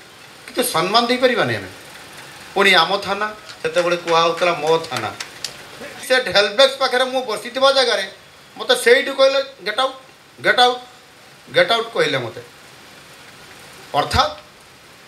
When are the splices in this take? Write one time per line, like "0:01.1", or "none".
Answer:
0:05.9

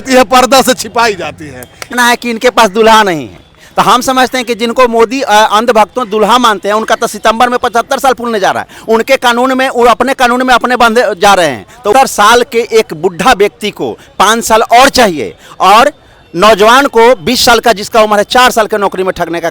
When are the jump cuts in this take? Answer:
0:01.9
0:11.9

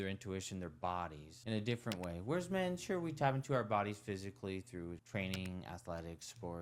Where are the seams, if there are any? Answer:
0:01.3

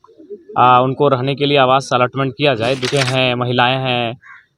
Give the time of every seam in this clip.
0:02.9

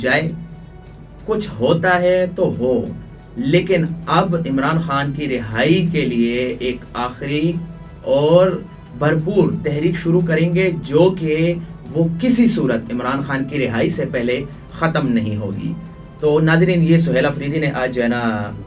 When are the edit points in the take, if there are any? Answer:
none

